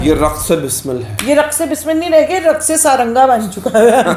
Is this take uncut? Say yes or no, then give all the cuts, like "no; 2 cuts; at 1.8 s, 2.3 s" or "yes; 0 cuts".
yes; 0 cuts